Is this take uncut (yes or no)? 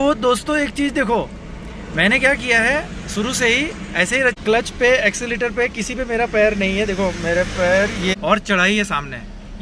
no